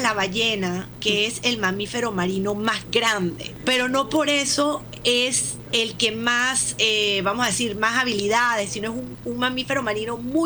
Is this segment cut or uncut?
cut